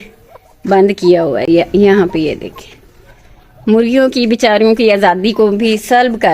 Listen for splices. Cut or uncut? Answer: uncut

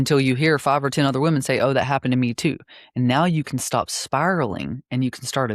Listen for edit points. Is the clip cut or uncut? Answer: uncut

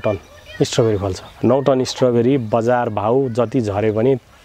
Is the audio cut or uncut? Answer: cut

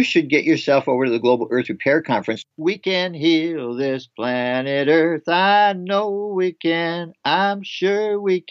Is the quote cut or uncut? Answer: cut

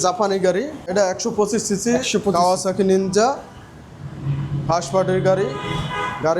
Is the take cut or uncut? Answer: cut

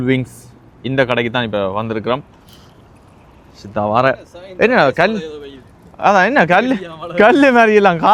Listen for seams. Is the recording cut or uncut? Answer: uncut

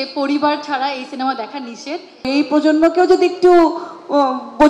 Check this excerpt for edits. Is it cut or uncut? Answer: cut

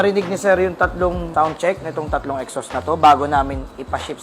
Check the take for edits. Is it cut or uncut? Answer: cut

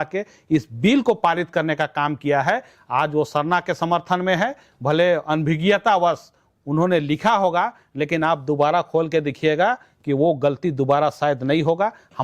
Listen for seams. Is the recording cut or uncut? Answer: cut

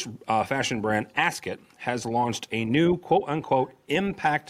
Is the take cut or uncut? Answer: uncut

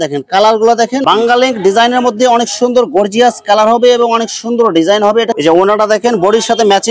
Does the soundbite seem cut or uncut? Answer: cut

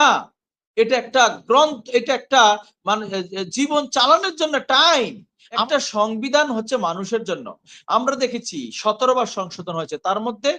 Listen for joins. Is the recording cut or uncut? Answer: cut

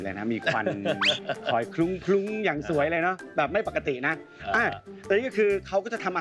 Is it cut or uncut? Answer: uncut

